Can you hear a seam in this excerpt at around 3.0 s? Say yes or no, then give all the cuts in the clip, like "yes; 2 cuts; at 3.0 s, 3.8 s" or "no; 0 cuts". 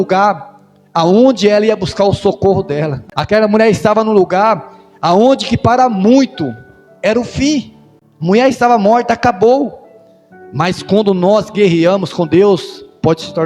yes; 1 cut; at 3.0 s